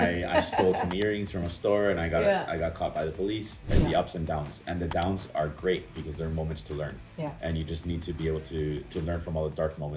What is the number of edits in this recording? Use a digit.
1